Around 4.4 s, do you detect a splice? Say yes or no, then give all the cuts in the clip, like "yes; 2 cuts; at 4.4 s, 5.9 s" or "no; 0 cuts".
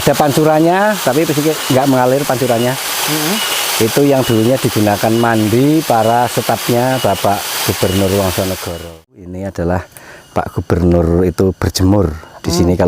no; 1 cut; at 9.4 s